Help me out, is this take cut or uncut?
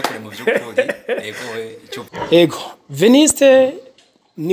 cut